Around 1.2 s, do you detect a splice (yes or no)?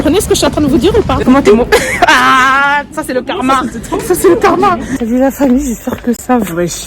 yes